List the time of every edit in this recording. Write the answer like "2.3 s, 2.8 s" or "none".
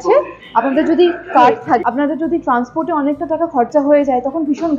1.8 s